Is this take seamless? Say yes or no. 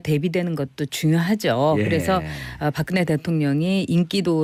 yes